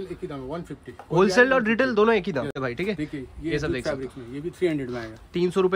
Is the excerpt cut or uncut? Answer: cut